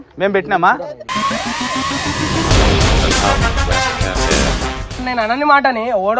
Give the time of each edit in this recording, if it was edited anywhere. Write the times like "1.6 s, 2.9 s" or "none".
5.1 s